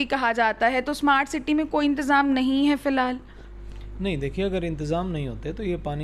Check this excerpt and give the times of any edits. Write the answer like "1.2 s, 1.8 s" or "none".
none